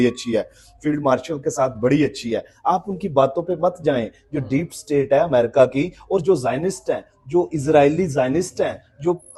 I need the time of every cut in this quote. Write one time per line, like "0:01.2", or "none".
none